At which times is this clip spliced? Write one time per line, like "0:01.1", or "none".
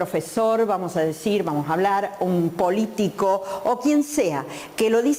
none

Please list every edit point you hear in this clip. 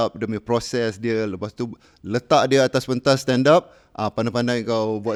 none

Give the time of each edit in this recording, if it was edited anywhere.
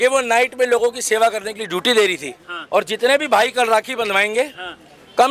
0:02.5

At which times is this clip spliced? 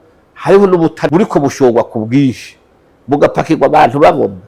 0:01.1

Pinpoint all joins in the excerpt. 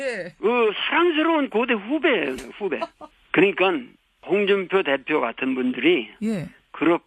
0:03.2

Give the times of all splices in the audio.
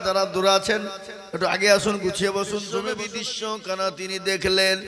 0:02.8

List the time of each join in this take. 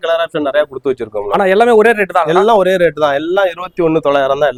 none

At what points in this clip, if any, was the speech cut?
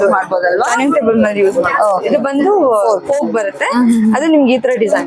none

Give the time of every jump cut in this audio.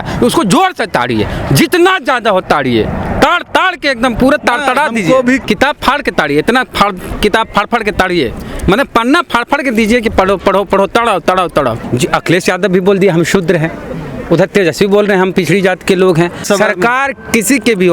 0:05.4
0:11.8
0:16.4

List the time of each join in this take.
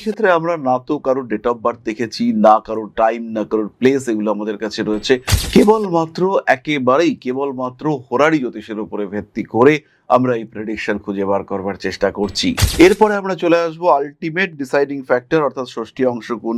none

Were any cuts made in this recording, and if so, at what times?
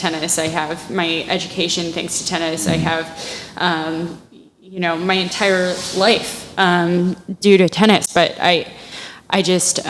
none

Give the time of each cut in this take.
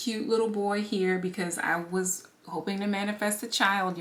none

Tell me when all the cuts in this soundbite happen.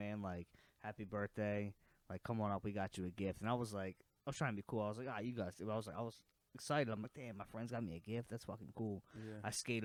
none

